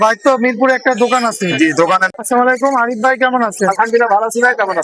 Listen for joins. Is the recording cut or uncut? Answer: cut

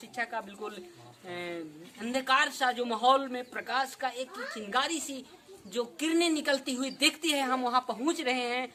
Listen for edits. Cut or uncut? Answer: uncut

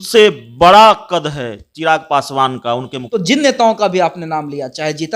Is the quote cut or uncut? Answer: cut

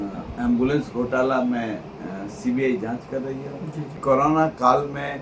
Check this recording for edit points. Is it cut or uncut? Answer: cut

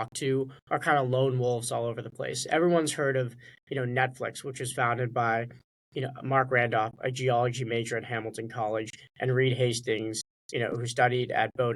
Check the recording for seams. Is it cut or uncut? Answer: uncut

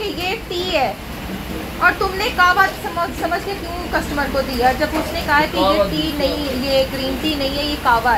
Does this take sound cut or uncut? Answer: uncut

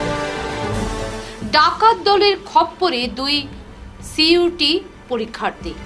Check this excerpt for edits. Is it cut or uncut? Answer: uncut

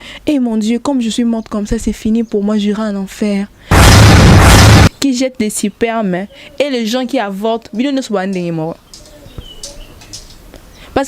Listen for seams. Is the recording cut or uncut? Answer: cut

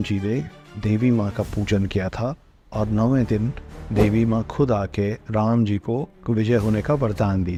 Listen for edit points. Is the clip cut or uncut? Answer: uncut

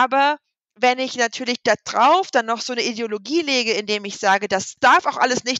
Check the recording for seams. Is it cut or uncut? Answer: cut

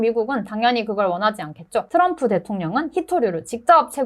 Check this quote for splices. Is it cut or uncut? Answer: cut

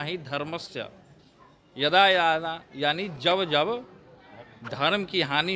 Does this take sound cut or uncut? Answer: uncut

